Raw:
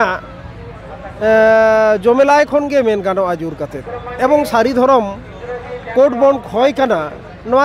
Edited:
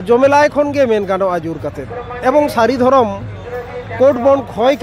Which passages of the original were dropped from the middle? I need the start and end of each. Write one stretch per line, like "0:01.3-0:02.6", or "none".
none